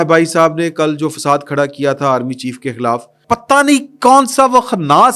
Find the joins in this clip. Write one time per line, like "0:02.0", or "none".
0:03.1